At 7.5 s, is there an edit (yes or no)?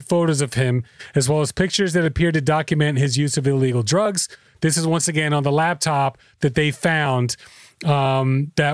no